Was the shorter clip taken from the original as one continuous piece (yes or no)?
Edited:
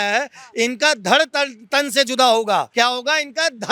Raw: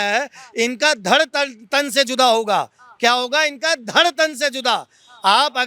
no